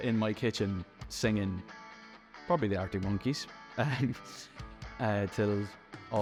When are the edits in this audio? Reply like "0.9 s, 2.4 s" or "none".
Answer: none